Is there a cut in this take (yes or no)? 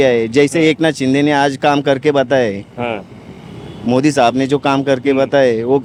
no